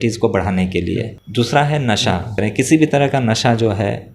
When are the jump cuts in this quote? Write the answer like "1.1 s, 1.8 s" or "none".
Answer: 1.2 s, 2.3 s